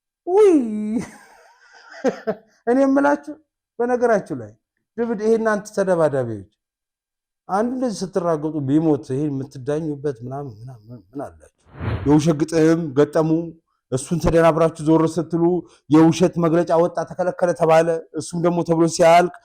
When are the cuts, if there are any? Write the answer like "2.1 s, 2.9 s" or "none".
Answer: 11.9 s